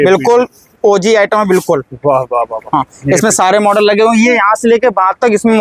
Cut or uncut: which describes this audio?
uncut